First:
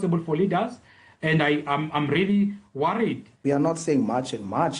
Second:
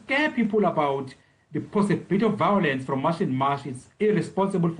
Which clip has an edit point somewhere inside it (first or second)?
first